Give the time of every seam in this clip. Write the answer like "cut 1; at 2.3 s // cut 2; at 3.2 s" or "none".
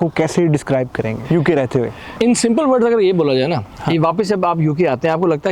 cut 1; at 1.2 s // cut 2; at 2.1 s